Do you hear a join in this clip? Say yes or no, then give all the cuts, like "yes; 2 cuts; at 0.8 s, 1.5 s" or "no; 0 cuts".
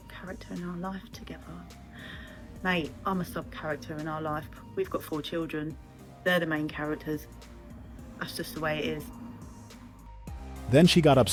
no; 0 cuts